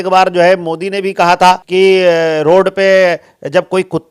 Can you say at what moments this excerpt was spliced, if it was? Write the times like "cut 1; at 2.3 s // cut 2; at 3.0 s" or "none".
cut 1; at 1.6 s